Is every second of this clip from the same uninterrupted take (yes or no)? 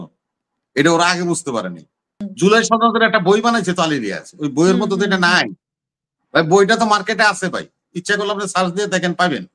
no